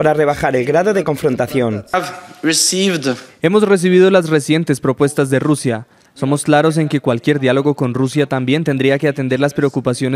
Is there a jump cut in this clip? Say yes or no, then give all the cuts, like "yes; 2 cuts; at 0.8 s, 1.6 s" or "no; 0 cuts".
yes; 1 cut; at 1.9 s